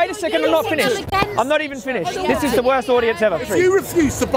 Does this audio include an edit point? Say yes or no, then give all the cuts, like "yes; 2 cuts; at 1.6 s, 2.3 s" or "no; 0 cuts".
yes; 1 cut; at 3.5 s